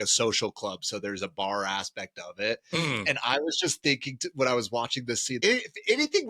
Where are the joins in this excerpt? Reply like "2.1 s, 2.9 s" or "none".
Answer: 5.4 s